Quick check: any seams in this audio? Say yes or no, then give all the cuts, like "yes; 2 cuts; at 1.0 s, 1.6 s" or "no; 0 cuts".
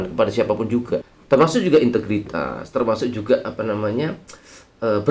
yes; 1 cut; at 1.1 s